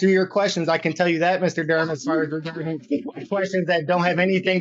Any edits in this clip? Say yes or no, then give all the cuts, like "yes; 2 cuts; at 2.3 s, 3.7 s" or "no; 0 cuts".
no; 0 cuts